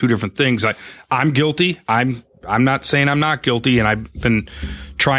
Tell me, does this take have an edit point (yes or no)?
no